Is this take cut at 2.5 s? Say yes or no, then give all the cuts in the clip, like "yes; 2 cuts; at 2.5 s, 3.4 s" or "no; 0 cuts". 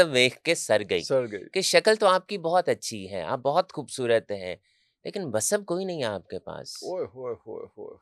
no; 0 cuts